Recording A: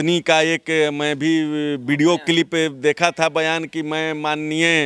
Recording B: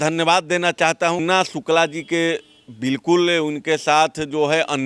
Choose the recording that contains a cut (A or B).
B